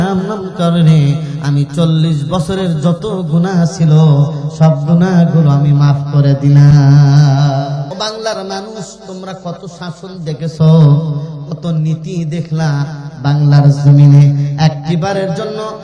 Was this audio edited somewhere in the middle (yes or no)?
yes